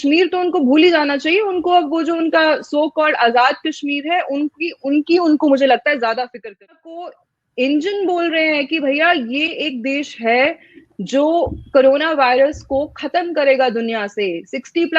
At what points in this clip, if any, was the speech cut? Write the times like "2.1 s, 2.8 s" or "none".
6.9 s